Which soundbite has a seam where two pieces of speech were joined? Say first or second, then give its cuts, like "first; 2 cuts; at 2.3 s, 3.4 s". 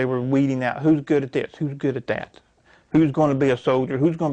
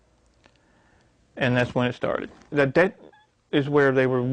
second; 1 cut; at 2.5 s